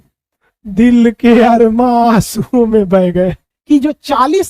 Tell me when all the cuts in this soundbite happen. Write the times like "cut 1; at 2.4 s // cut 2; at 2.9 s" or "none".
cut 1; at 3.5 s